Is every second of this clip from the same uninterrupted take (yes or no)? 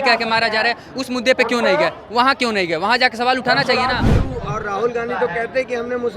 no